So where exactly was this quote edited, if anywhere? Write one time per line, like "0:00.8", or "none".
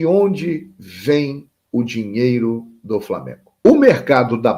0:03.5

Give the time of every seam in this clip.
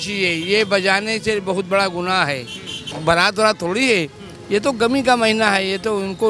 0:02.9

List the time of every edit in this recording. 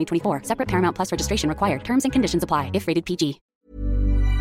0:03.5

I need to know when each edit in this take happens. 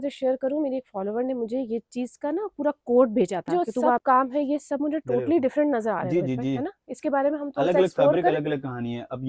0:04.0

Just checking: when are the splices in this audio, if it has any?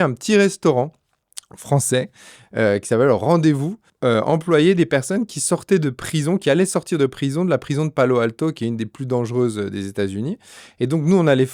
0:03.8

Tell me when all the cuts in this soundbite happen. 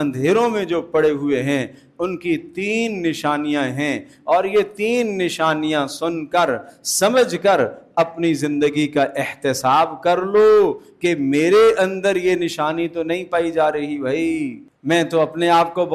0:14.7

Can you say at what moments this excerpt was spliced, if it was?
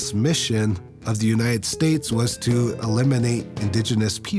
none

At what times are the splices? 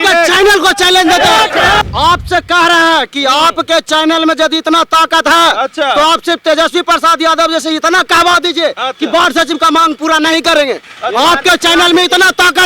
0:01.8

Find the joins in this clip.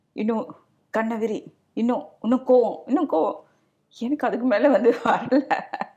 none

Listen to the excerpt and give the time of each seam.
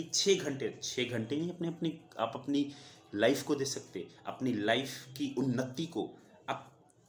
none

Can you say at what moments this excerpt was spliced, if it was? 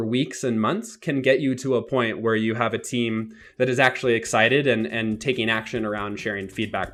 none

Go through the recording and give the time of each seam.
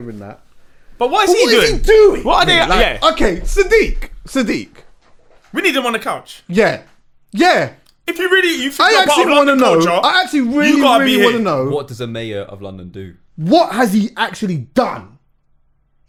none

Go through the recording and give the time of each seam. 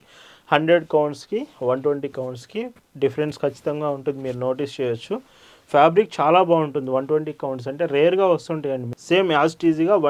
0:08.9

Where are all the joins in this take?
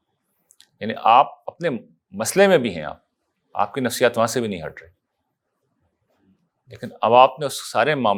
none

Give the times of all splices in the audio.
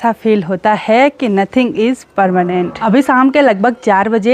none

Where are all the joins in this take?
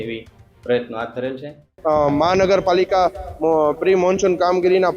0:01.7

